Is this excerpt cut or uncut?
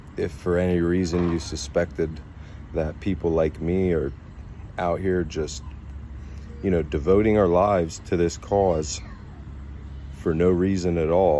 uncut